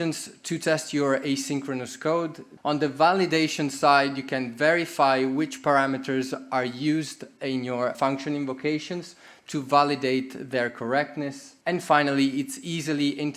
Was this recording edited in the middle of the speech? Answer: yes; 3 cuts; at 2.5 s, 7.9 s, 11.5 s

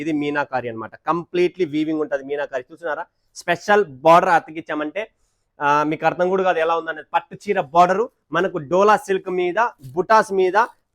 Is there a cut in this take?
no; 0 cuts

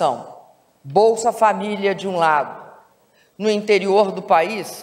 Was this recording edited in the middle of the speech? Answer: yes; 1 cut; at 3.7 s

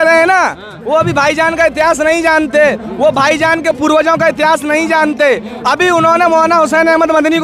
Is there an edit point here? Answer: no; 0 cuts

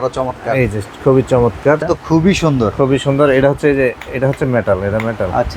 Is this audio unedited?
no; 1 cut; at 1.8 s

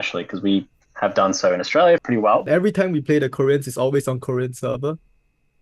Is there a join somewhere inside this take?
yes; 1 cut; at 2.0 s

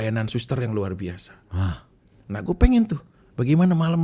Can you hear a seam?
no; 0 cuts

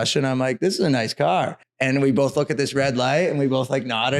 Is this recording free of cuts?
no; 1 cut; at 1.6 s

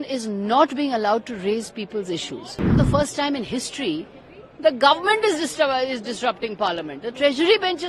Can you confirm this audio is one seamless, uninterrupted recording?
no; 1 cut; at 2.8 s

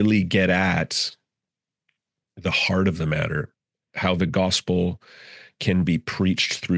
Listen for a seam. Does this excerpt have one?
no; 0 cuts

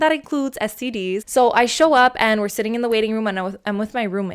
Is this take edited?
yes; 1 cut; at 1.2 s

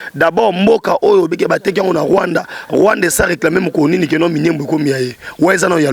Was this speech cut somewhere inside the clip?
no; 0 cuts

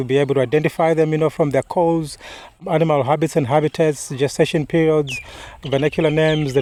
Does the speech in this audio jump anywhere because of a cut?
no; 0 cuts

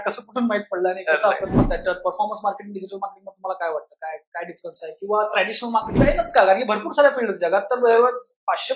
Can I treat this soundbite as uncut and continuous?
no; 2 cuts; at 1.5 s, 5.9 s

